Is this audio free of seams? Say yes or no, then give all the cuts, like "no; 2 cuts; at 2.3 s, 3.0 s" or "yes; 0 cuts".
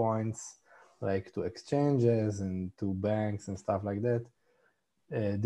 yes; 0 cuts